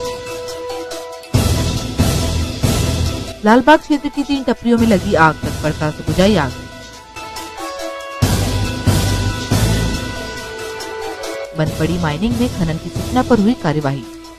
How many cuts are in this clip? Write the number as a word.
one